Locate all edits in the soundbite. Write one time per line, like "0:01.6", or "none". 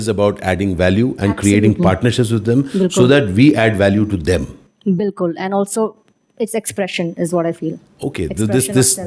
none